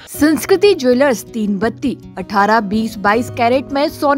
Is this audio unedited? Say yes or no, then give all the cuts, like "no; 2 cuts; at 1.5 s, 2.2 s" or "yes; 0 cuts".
yes; 0 cuts